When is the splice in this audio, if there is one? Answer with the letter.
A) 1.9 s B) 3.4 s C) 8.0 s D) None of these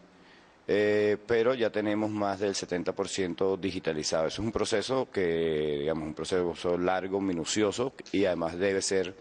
C